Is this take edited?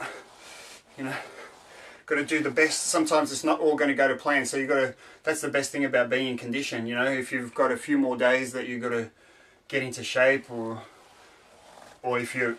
yes; 1 cut; at 3.9 s

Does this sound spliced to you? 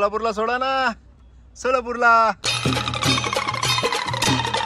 yes; 1 cut; at 2.5 s

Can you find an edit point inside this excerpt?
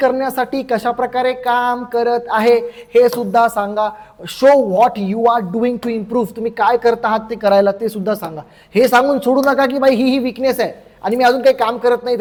no; 0 cuts

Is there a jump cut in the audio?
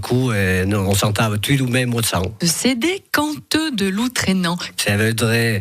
yes; 2 cuts; at 2.3 s, 4.7 s

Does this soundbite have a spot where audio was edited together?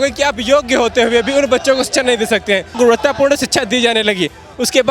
yes; 1 cut; at 2.8 s

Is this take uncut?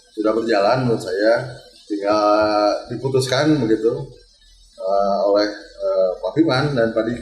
yes; 0 cuts

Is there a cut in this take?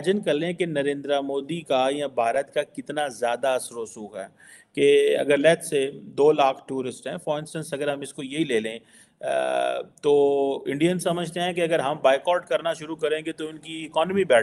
no; 0 cuts

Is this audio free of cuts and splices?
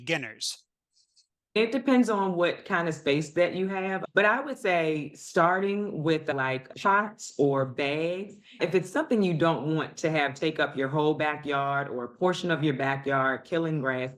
yes; 0 cuts

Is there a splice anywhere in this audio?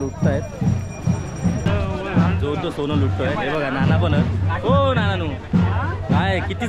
yes; 1 cut; at 1.7 s

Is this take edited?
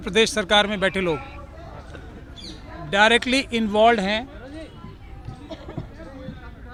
no; 0 cuts

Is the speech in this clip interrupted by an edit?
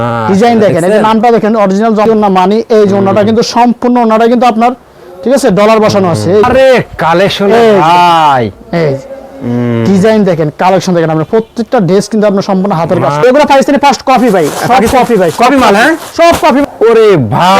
yes; 4 cuts; at 2.1 s, 6.4 s, 13.2 s, 16.6 s

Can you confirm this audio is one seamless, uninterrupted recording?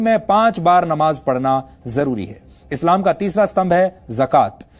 yes; 0 cuts

